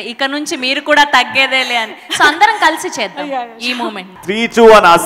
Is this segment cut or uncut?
cut